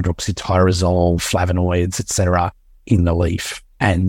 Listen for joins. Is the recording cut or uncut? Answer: uncut